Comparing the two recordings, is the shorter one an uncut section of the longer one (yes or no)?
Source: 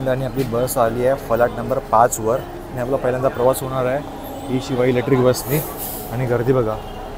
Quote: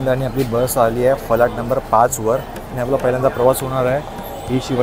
yes